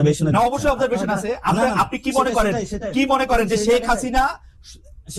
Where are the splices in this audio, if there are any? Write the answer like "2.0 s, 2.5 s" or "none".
none